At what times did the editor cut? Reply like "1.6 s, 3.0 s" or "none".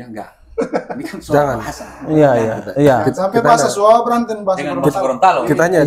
none